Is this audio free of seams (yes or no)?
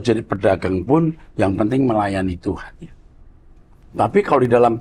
yes